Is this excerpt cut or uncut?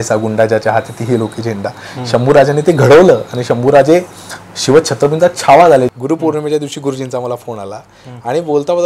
cut